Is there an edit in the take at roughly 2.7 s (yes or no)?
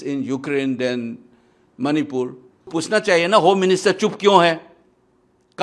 yes